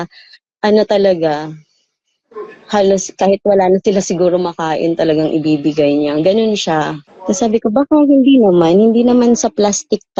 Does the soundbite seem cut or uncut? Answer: cut